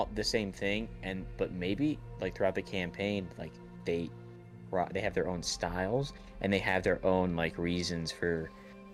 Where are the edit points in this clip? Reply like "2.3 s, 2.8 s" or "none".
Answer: none